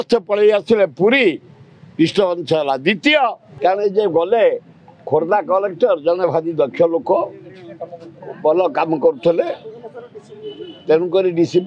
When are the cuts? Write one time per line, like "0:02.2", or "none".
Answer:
0:03.4